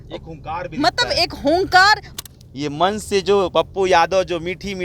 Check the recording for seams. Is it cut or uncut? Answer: cut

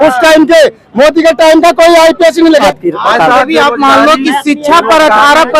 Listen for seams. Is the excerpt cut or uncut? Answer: cut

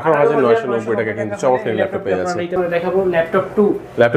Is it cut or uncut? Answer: cut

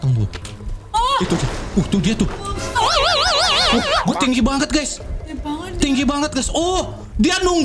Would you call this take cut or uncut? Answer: uncut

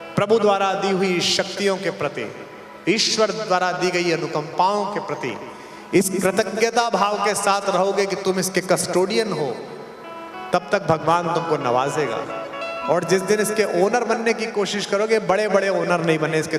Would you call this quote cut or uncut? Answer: uncut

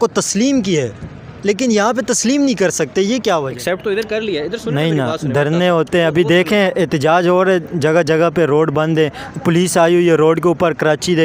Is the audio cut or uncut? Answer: cut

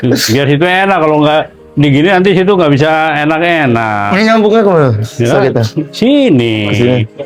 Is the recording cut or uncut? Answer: uncut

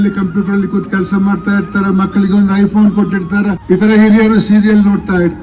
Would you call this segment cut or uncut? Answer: cut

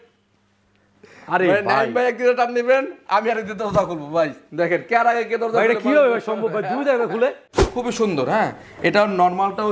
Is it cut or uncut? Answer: cut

